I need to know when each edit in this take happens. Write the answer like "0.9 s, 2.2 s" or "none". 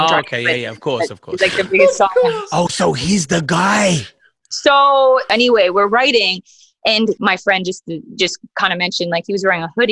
5.3 s, 7.2 s